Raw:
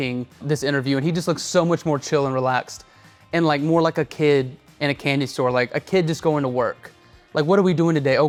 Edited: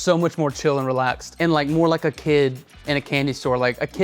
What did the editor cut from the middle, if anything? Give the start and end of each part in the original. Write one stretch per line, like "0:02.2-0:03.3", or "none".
0:02.7-0:03.2